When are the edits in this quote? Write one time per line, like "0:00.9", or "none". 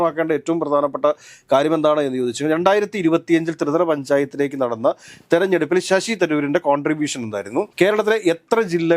none

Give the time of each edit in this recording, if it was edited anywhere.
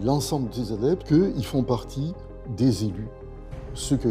0:01.0

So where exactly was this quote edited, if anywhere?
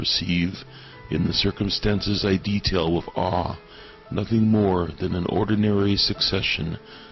0:05.6

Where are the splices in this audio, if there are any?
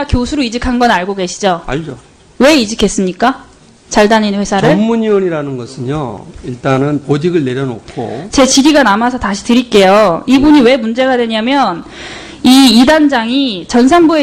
0:04.3

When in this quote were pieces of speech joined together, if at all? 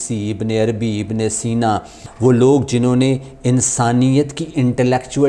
0:02.0

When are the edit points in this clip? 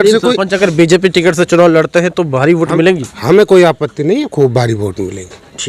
none

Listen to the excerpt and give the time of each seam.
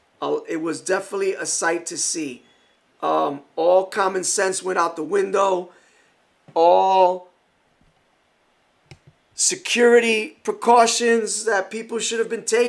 0:04.8

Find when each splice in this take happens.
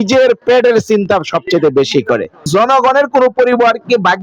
0:02.5

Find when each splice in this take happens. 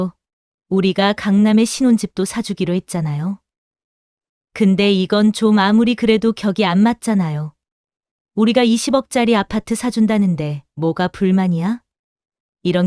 none

